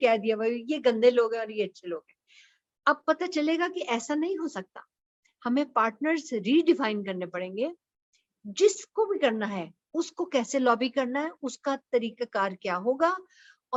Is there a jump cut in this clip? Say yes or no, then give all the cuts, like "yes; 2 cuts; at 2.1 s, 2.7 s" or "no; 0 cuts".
no; 0 cuts